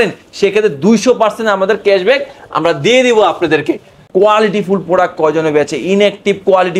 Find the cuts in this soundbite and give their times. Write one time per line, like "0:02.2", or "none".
0:03.9

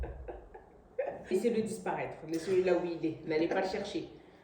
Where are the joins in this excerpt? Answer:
0:01.3

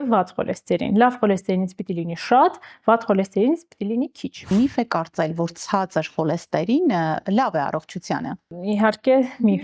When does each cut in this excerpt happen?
0:04.5
0:08.6

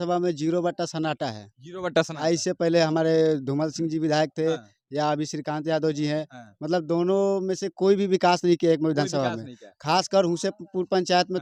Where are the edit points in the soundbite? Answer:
none

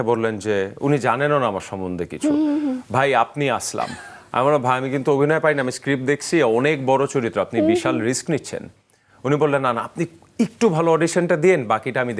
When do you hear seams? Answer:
none

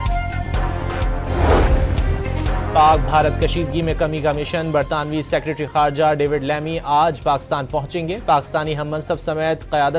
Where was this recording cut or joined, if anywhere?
0:01.2

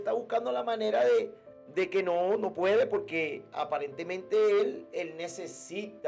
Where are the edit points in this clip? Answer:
none

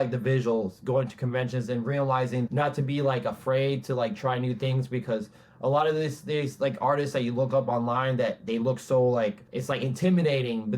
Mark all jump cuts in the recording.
0:02.5
0:09.5

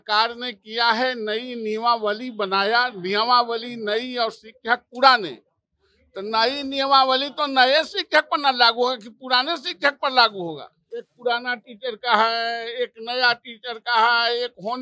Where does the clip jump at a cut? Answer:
0:10.8

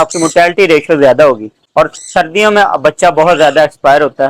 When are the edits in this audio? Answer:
0:01.5

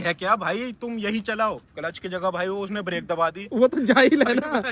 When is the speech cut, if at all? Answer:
0:01.7

